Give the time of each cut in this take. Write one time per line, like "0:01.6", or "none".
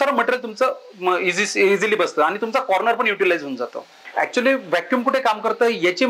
0:04.0